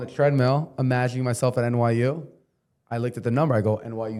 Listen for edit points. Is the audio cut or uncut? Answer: uncut